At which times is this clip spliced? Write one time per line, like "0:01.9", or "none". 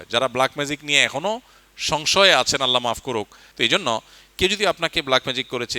0:03.4

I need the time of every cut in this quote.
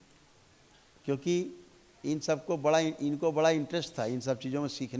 none

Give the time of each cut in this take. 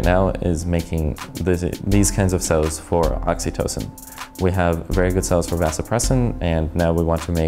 none

